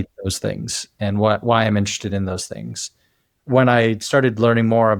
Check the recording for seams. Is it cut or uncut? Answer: cut